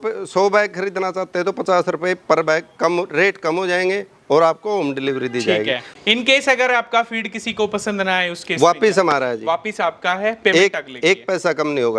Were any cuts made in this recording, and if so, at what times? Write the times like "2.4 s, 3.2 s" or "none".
5.9 s